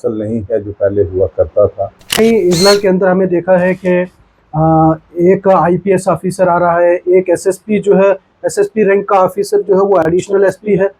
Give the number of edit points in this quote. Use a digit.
1